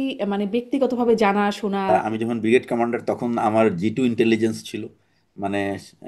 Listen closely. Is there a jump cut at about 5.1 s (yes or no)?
no